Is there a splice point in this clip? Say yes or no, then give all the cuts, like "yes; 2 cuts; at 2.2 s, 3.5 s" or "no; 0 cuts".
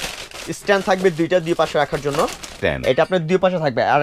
yes; 1 cut; at 2.5 s